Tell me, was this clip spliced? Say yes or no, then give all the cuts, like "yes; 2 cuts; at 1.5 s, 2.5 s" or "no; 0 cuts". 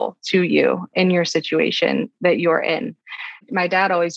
no; 0 cuts